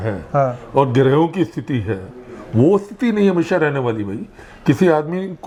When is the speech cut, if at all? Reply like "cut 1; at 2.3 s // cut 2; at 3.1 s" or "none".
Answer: none